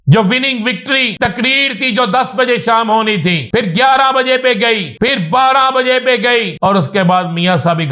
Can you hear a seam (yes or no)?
yes